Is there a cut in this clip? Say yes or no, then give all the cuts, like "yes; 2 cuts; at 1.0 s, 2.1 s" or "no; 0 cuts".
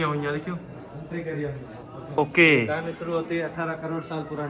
yes; 1 cut; at 2.1 s